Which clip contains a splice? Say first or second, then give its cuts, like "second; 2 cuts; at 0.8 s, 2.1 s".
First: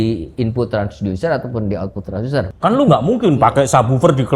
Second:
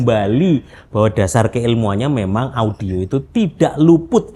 first; 1 cut; at 2.5 s